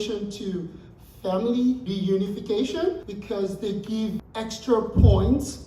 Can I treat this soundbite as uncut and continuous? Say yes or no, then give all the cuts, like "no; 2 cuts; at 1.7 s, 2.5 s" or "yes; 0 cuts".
no; 3 cuts; at 1.8 s, 3.1 s, 4.2 s